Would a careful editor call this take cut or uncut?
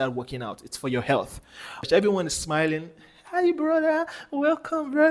cut